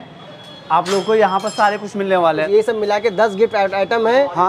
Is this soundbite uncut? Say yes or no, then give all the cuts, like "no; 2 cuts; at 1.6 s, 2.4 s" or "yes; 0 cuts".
no; 1 cut; at 2.3 s